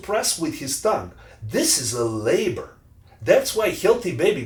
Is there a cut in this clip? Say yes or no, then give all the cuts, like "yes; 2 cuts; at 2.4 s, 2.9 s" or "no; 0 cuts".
no; 0 cuts